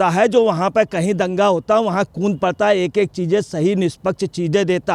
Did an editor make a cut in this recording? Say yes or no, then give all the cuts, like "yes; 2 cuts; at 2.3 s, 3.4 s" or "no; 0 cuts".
no; 0 cuts